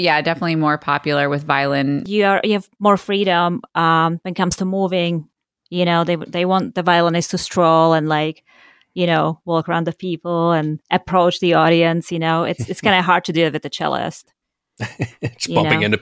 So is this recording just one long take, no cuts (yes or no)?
no